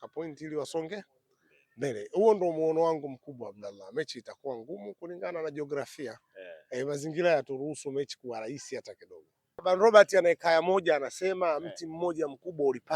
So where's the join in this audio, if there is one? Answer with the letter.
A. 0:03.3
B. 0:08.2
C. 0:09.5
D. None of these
C